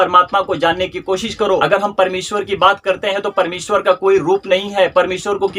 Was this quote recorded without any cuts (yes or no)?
yes